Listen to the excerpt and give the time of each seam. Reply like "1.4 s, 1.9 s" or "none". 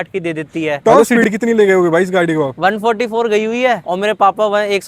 0.8 s, 2.5 s, 3.9 s

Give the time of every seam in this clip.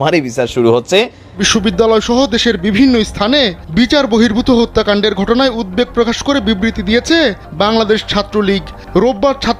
1.4 s, 3.6 s

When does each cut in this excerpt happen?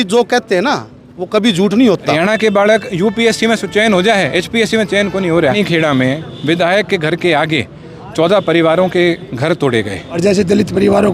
2.1 s, 5.5 s, 10.2 s

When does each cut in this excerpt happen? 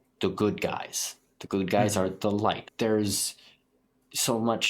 2.7 s

